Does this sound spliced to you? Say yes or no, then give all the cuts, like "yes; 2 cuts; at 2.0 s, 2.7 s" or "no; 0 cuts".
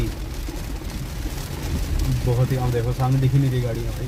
no; 0 cuts